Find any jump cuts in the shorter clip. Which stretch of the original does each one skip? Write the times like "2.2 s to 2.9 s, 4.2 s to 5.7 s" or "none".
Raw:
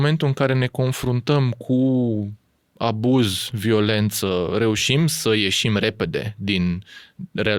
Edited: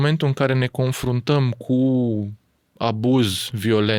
none